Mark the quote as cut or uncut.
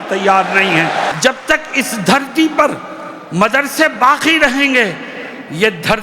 cut